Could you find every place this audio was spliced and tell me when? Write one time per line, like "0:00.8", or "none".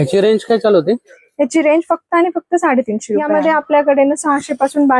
0:03.3